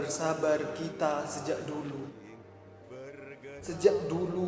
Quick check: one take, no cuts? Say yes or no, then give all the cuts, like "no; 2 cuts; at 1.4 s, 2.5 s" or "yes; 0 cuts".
yes; 0 cuts